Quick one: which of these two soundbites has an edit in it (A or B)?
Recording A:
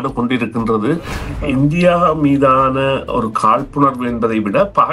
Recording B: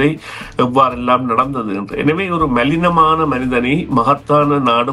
A